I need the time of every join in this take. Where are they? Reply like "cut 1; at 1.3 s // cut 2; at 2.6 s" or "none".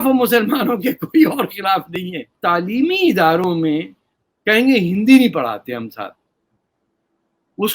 cut 1; at 2.3 s